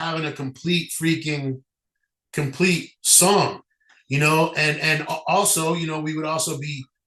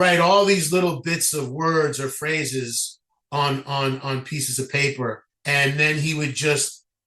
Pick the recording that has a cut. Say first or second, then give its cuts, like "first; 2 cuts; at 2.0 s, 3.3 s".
second; 1 cut; at 5.3 s